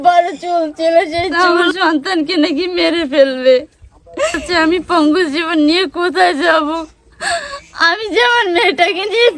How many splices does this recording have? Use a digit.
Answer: 2